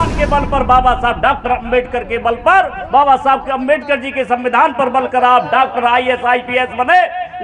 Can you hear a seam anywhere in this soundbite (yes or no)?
no